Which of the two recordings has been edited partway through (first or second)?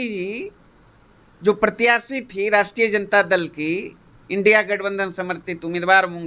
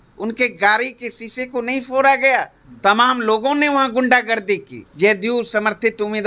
second